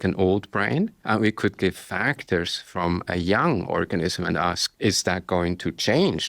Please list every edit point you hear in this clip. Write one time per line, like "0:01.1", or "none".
0:01.0
0:04.7